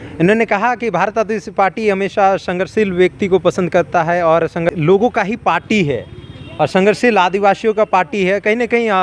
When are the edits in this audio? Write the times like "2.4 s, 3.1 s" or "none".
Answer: 4.7 s